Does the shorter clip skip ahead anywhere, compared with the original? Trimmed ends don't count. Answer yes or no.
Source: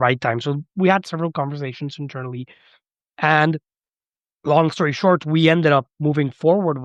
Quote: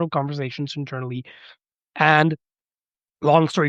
no